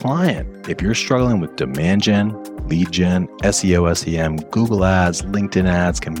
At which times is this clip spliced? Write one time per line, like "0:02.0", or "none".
none